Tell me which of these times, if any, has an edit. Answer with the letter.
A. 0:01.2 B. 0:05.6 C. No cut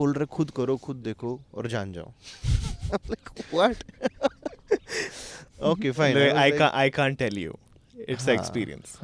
C